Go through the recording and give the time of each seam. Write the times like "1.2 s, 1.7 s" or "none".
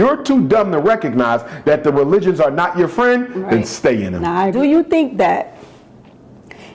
4.5 s

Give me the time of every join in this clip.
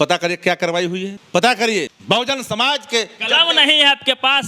1.2 s, 1.9 s

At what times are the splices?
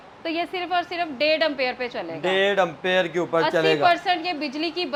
none

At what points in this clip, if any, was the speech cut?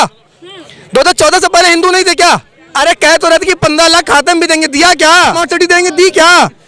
2.6 s, 5.4 s

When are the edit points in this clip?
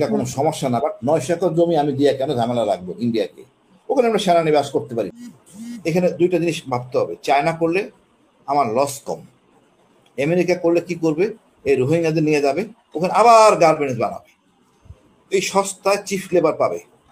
5.1 s

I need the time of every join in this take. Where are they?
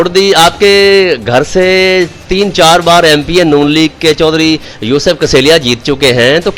none

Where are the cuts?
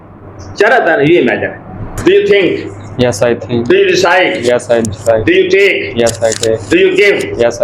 2.0 s

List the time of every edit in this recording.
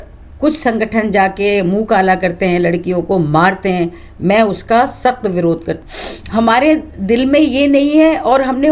5.8 s

